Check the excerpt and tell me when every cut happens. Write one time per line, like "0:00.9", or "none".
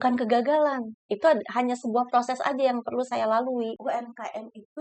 0:03.8